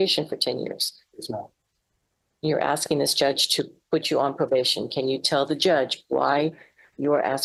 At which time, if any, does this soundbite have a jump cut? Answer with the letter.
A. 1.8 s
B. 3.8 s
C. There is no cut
C